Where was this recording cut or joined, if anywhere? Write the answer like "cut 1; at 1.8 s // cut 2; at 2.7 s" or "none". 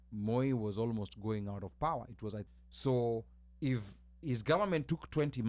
cut 1; at 2.4 s